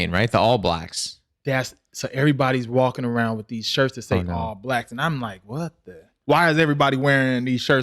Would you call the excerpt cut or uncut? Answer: cut